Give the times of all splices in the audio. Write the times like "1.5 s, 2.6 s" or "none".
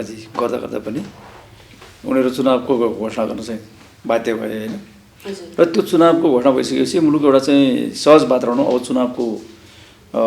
none